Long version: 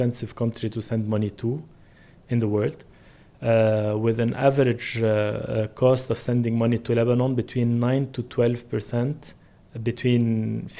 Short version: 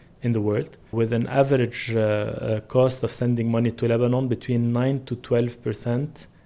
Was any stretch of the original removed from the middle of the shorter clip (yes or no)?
yes